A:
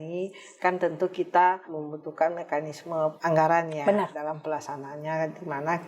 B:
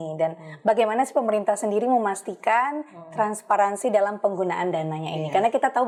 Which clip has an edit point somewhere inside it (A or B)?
A